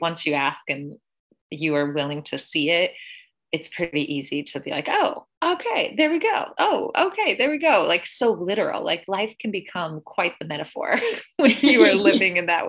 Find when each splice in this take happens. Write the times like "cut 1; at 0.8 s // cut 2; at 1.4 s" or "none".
cut 1; at 3.9 s